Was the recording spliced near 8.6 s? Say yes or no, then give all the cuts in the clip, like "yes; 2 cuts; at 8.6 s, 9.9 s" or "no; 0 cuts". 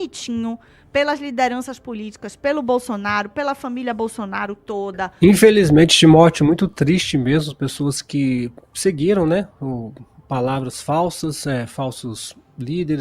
no; 1 cut; at 5.1 s